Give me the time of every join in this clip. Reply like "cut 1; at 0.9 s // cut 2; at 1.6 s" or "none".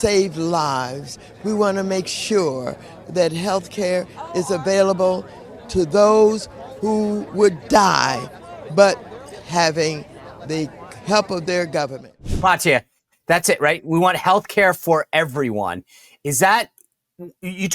cut 1; at 12.3 s